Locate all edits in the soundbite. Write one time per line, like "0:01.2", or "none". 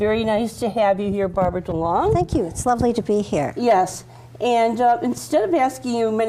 0:02.9